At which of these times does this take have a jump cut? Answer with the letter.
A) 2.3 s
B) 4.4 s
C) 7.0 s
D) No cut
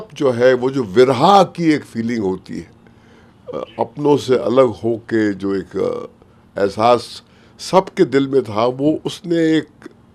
D